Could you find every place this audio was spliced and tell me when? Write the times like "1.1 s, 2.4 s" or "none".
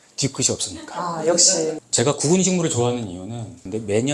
1.8 s